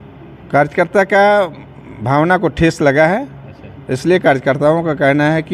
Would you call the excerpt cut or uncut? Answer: uncut